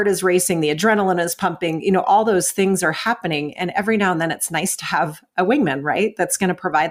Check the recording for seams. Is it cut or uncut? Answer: uncut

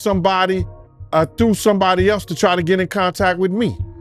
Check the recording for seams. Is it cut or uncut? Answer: uncut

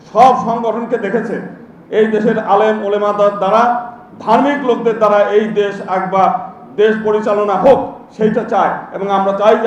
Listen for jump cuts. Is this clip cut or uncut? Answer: uncut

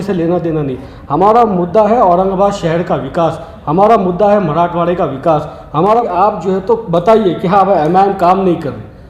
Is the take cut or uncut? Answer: cut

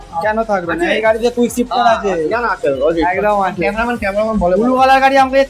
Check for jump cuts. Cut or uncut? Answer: uncut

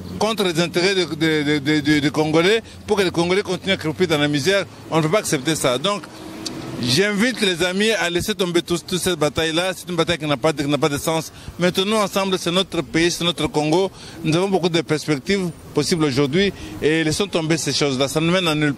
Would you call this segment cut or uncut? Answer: uncut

